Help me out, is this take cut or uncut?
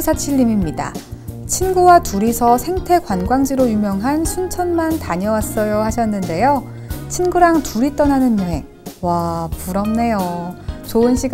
uncut